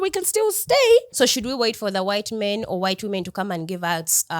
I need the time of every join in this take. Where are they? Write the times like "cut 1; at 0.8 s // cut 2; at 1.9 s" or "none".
cut 1; at 1.1 s